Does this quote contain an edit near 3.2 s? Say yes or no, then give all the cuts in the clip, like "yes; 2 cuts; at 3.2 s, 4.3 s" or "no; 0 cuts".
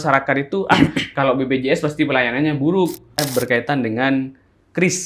yes; 1 cut; at 3.2 s